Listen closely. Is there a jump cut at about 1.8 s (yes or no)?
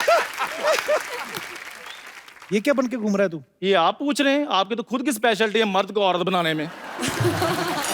yes